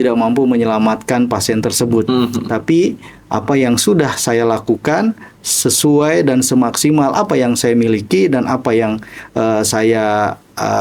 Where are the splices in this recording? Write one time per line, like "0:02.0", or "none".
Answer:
none